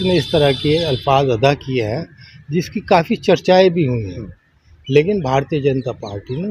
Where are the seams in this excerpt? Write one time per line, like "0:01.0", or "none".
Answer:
none

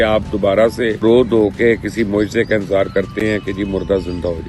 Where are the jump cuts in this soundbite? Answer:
0:01.0

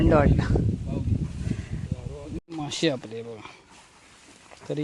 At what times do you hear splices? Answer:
0:02.4

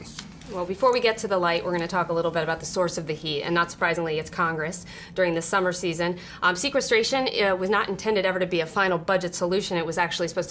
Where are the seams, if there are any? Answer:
none

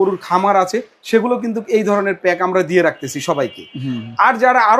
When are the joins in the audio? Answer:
none

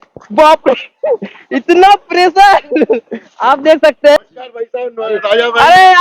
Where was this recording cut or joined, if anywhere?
0:04.2

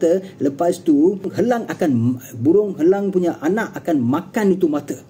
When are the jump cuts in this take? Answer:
0:01.3

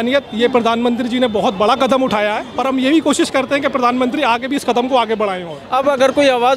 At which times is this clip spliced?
0:02.5
0:05.6

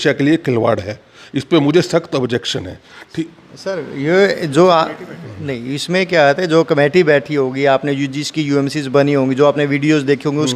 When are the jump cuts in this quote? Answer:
none

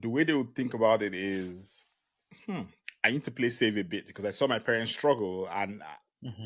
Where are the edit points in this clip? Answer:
none

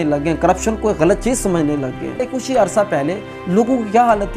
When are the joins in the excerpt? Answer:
0:02.2

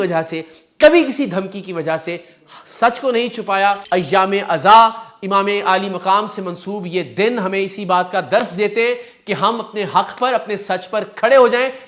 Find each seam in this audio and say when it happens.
0:03.8

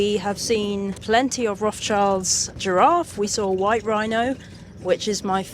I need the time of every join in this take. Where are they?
0:01.0
0:02.6

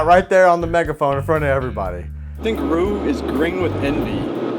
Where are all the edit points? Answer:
0:02.4

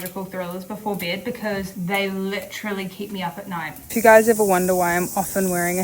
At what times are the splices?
0:01.7
0:03.8

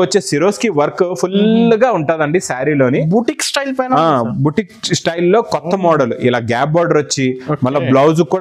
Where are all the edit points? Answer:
none

